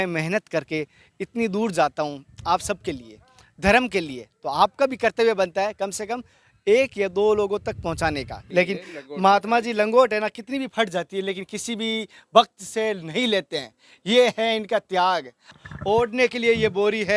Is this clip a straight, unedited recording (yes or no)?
no